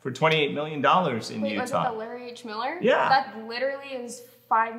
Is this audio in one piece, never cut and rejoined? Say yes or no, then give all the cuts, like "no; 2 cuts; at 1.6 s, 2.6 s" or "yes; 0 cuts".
yes; 0 cuts